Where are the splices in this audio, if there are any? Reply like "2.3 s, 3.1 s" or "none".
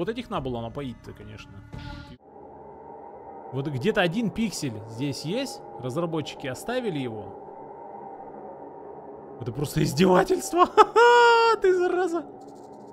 2.0 s